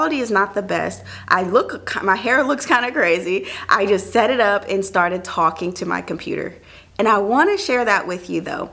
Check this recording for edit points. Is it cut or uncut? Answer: uncut